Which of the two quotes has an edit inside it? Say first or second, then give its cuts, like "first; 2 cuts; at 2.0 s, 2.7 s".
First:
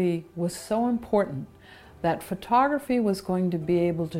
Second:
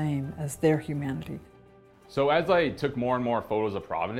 second; 1 cut; at 1.5 s